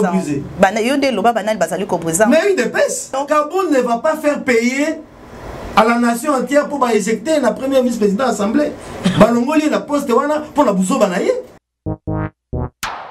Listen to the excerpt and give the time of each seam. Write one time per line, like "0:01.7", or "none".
0:03.2
0:11.7